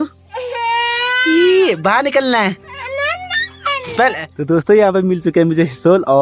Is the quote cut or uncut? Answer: cut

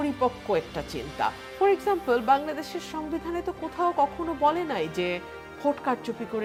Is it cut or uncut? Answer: uncut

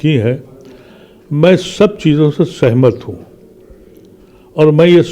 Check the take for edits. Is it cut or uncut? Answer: uncut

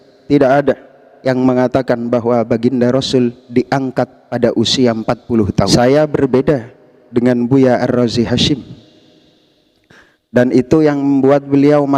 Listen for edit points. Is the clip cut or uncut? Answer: cut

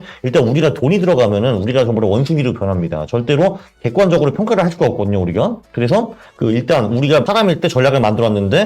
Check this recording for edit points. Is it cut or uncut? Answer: cut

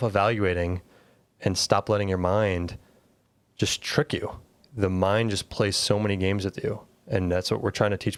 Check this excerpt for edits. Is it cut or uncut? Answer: uncut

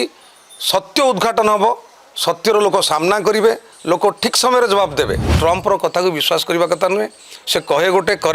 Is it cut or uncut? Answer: cut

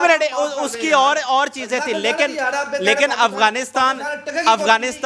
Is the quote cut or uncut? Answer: uncut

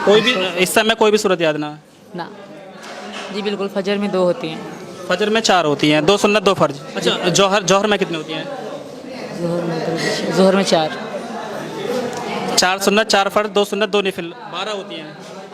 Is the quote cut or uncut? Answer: cut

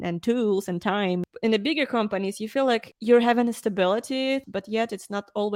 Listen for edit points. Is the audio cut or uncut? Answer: cut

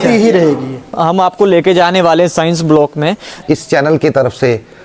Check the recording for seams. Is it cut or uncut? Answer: cut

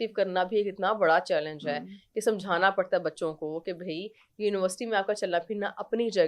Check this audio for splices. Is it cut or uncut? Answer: uncut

